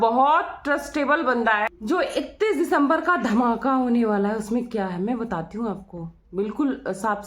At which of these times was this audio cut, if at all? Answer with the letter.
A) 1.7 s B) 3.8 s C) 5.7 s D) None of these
A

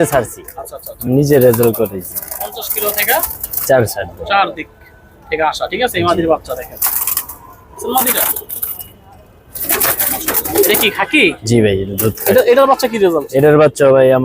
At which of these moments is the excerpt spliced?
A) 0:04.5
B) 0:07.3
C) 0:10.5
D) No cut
C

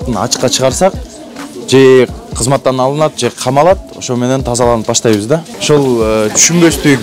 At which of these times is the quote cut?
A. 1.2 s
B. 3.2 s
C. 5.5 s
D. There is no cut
C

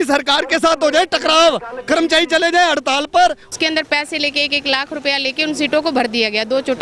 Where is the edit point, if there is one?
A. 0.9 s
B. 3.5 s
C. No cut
B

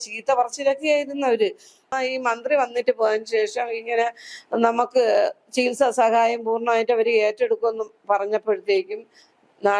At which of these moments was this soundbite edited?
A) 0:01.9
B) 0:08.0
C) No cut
A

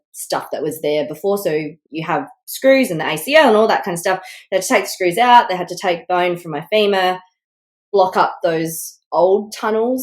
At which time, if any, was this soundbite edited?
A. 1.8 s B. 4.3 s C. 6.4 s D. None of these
A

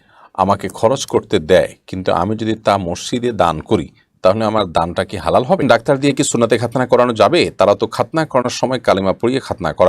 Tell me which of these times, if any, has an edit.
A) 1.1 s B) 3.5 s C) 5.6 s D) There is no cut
C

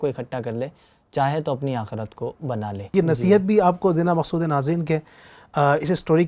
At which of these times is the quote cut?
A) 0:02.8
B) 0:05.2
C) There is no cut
A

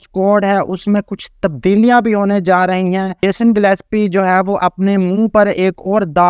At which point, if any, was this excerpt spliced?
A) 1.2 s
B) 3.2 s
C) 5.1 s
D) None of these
B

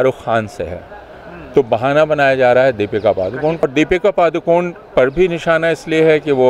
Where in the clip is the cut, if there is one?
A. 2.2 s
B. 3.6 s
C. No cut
B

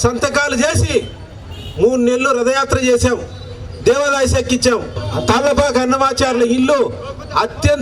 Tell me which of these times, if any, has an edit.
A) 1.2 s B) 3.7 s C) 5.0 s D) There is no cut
C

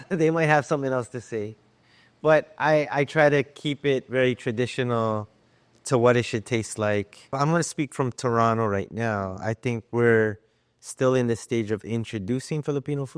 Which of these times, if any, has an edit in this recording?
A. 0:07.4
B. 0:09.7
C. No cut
A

